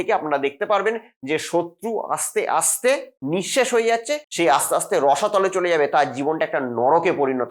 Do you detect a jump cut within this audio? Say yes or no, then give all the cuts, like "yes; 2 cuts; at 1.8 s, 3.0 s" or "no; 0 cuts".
yes; 1 cut; at 4.2 s